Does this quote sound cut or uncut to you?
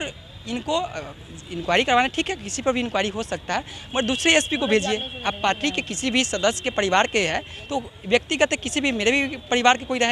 uncut